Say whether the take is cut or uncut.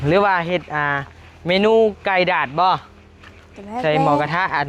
uncut